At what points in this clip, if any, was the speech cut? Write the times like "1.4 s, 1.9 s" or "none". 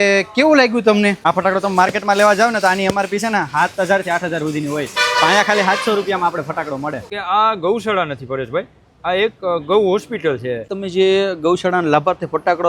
1.2 s, 7.1 s, 10.8 s